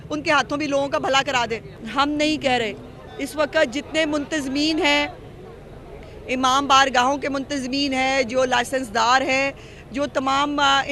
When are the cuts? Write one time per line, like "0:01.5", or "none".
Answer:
0:01.8